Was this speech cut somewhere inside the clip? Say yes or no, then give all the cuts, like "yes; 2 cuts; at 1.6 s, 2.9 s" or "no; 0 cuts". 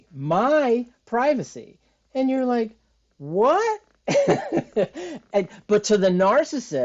no; 0 cuts